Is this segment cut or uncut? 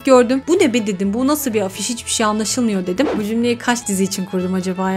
cut